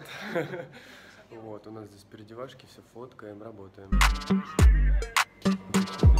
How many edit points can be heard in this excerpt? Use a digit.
1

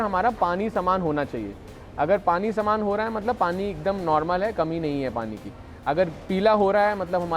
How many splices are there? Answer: 0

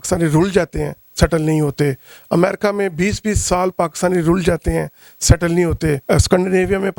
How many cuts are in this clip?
0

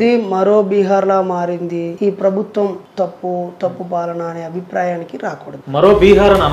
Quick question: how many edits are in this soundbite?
3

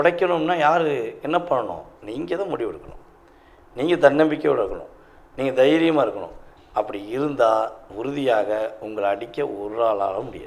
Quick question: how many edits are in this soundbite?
0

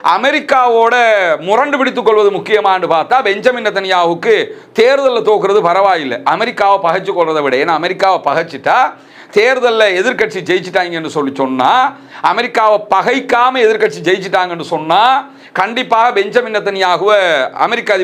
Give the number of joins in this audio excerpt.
0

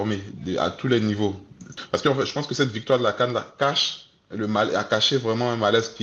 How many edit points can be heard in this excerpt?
1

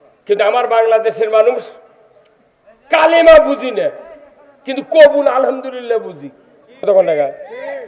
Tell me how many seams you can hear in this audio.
1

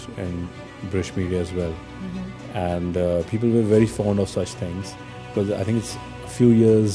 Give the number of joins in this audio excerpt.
0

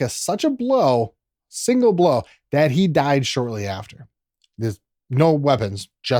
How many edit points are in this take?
0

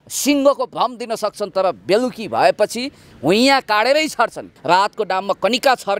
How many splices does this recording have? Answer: 1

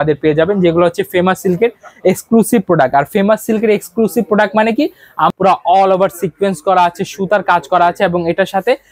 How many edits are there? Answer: 1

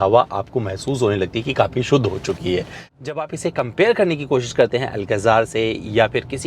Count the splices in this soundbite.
1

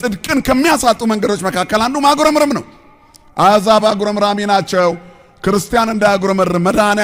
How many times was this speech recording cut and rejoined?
0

